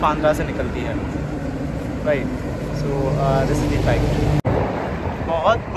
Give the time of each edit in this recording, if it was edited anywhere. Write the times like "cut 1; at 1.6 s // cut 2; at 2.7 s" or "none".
none